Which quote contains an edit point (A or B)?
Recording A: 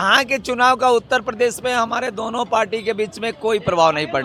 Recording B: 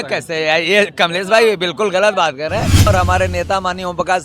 B